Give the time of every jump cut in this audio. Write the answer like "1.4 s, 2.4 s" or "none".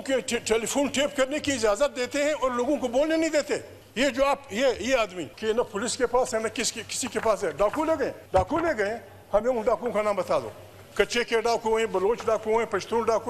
3.8 s, 5.3 s, 8.2 s